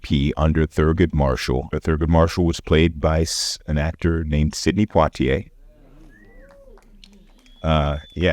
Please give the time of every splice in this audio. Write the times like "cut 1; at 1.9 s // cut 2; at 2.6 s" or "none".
cut 1; at 1.7 s